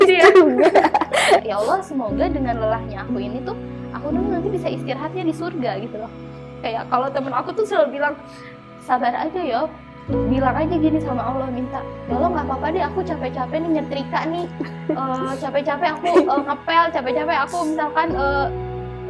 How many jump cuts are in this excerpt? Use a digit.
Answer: 1